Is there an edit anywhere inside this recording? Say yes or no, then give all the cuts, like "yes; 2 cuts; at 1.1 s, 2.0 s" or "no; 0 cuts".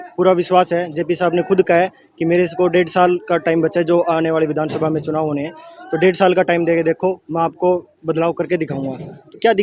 no; 0 cuts